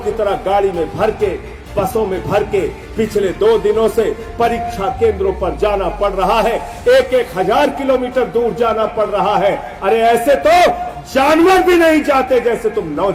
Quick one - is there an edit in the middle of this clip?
no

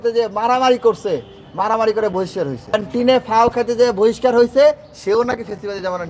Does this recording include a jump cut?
no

